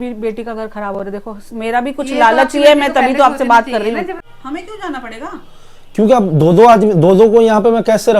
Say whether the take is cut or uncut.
cut